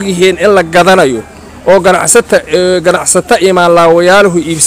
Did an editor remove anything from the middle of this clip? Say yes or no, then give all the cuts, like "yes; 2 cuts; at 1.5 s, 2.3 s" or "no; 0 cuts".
no; 0 cuts